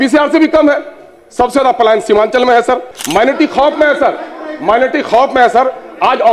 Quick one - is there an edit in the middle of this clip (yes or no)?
yes